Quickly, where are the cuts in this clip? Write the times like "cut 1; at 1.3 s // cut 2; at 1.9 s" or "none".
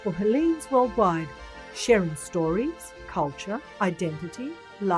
none